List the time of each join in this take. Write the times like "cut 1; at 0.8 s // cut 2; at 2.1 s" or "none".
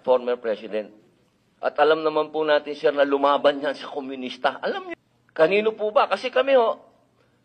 cut 1; at 4.9 s